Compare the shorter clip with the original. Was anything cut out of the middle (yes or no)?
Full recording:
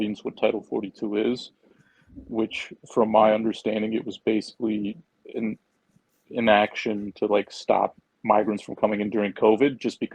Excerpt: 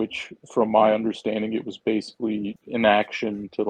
yes